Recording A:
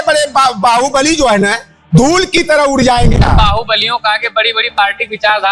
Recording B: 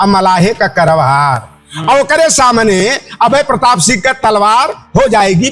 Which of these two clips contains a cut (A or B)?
A